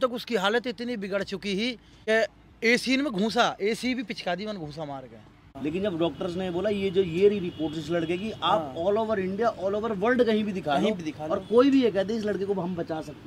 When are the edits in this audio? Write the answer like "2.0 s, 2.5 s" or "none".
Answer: 1.9 s, 5.5 s